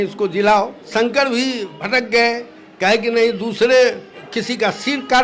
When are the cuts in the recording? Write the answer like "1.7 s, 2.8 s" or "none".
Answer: 0.9 s, 1.7 s, 4.1 s